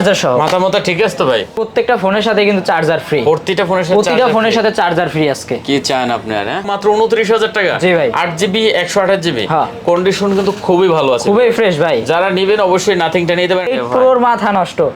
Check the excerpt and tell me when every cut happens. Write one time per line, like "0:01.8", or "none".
0:01.6
0:06.7
0:13.7